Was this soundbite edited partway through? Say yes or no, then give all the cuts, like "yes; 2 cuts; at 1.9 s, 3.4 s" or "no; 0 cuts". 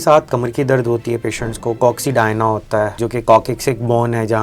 yes; 1 cut; at 3.0 s